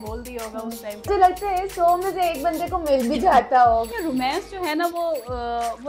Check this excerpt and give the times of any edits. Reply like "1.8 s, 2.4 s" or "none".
1.1 s, 3.9 s